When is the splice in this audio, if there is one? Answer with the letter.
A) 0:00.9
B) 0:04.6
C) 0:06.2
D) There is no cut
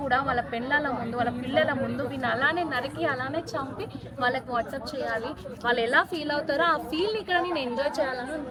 D